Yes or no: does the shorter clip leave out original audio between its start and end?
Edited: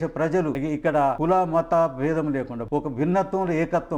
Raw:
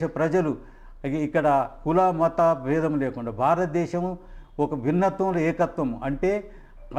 yes